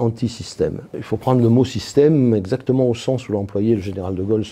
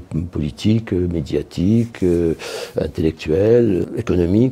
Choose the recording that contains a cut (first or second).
first